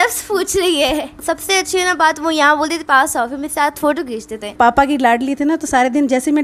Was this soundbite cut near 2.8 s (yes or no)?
no